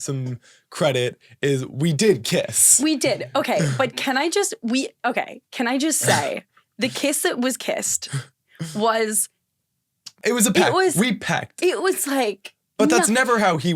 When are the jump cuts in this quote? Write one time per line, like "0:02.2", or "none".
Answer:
0:10.2

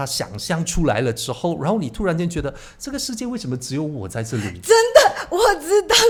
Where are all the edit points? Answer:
none

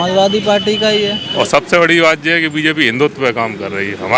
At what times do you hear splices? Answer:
0:01.3

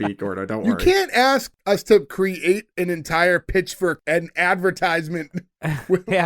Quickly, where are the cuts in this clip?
0:04.0

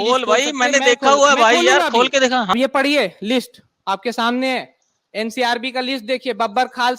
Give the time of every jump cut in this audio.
0:02.5

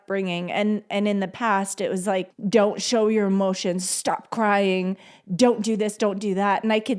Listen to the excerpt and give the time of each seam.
0:02.4

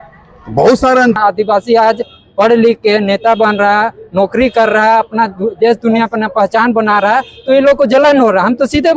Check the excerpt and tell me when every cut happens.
0:01.2

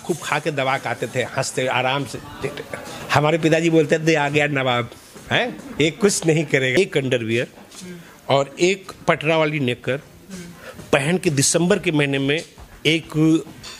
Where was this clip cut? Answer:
0:02.9
0:06.8

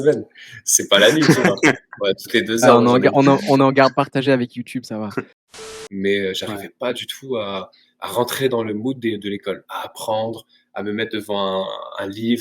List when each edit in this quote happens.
0:05.4

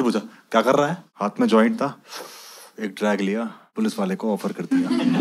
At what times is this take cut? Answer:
0:01.1
0:03.6

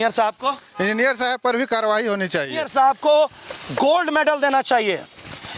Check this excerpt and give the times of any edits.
0:02.6

